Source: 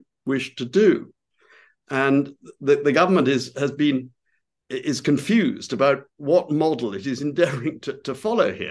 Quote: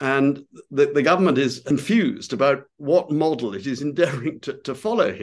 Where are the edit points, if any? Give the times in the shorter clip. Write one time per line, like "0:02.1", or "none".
0:01.7